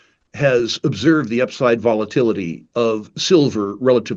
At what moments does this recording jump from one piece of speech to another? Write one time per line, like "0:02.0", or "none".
0:02.6

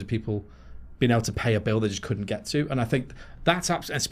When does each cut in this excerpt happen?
none

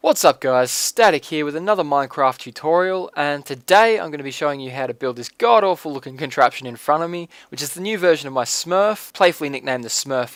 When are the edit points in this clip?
none

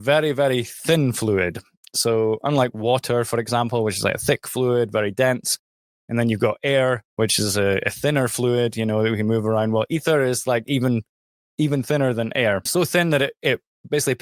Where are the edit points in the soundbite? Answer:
0:12.7

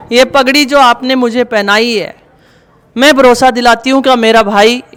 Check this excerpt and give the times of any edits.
none

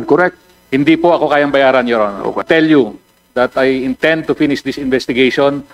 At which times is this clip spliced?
0:02.4

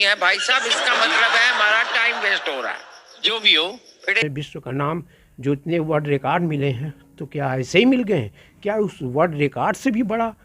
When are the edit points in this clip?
0:04.2

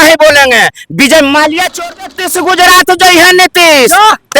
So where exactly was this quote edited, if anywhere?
0:01.9

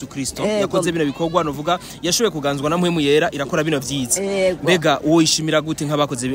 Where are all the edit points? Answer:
none

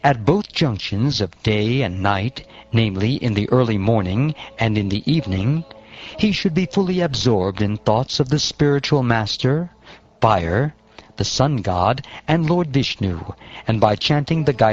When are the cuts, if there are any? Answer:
0:09.3

